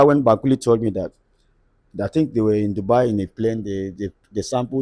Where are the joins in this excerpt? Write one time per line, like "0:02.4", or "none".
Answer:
none